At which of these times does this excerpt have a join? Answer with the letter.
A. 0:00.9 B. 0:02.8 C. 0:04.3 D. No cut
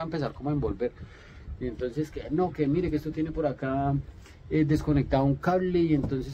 D